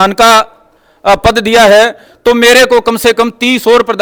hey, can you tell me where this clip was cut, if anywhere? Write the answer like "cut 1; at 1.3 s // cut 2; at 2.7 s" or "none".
none